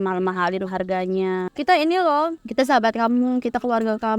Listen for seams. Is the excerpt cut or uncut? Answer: cut